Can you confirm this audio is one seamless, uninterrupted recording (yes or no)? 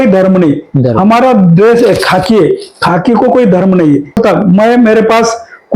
no